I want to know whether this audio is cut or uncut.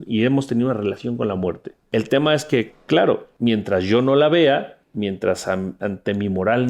cut